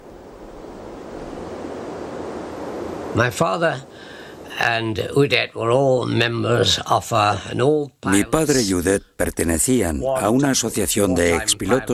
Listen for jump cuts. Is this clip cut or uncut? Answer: uncut